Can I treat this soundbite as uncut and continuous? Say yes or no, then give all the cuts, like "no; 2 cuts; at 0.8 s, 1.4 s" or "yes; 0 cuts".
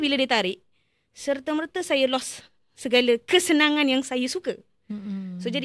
yes; 0 cuts